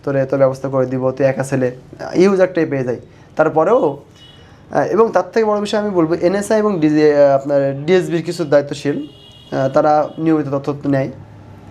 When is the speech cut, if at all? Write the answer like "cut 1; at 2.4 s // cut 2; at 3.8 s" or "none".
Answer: none